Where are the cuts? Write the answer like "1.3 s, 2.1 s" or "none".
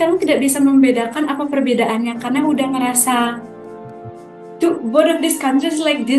none